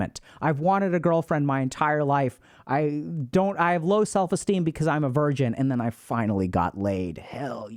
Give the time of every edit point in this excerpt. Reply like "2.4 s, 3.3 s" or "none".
none